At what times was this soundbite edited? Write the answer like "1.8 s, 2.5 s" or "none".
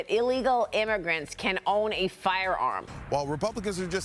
2.9 s

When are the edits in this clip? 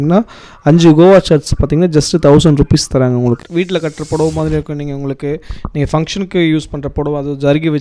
3.4 s

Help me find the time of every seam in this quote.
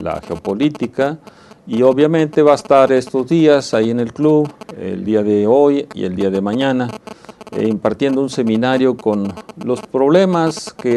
9.7 s

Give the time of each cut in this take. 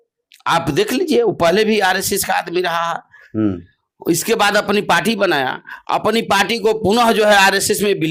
none

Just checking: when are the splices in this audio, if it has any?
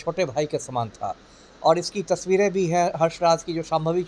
none

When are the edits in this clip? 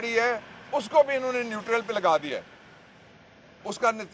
none

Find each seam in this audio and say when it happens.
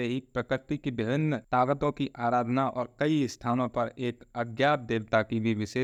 none

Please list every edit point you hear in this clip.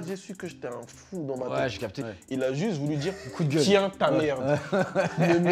2.1 s

